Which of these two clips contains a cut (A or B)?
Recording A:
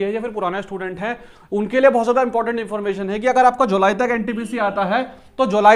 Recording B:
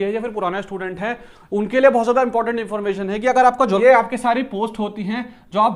B